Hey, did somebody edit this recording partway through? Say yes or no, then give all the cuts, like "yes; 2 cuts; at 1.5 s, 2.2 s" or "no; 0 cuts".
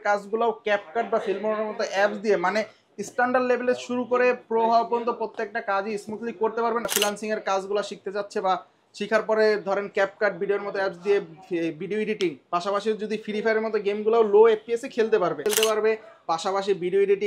yes; 2 cuts; at 6.9 s, 15.5 s